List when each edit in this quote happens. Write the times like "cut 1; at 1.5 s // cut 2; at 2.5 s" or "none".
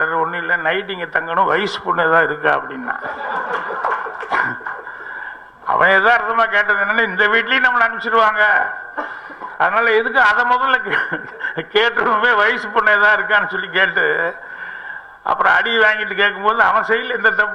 none